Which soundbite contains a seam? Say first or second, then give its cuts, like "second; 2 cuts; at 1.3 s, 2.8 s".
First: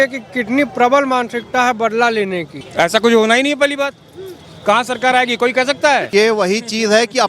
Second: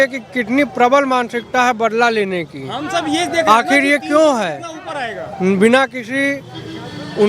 first; 2 cuts; at 2.6 s, 6.1 s